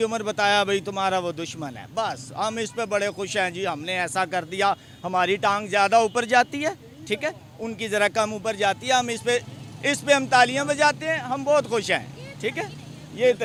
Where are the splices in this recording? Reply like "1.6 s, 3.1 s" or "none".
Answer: none

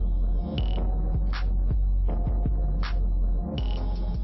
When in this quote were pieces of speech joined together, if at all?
none

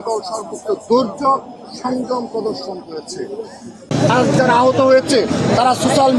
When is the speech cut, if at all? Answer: 3.8 s

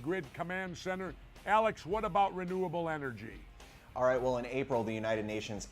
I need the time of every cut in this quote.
2.8 s

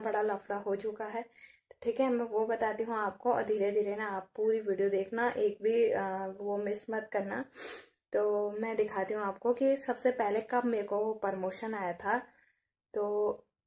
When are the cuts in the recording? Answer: none

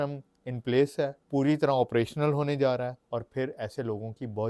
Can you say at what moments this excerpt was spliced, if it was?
1.2 s, 3.0 s

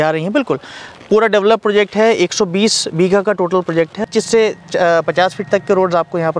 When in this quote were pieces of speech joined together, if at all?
4.0 s

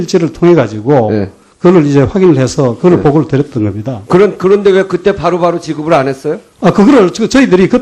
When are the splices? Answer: 5.7 s

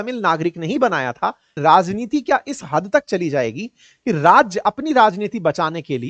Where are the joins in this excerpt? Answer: 1.5 s

